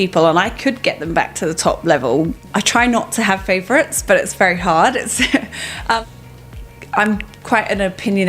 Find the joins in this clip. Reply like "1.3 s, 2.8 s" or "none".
2.3 s, 6.1 s